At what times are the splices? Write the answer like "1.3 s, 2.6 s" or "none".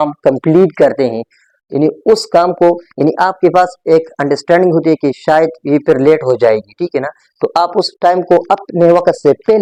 none

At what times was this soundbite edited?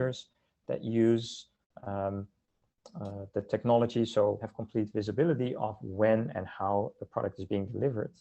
4.5 s

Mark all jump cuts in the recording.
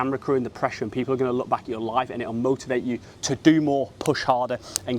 none

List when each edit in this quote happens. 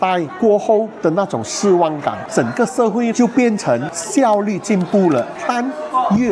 2.2 s, 4.0 s, 5.4 s

